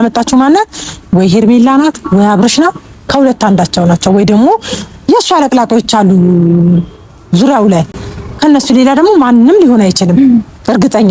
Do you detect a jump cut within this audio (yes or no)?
no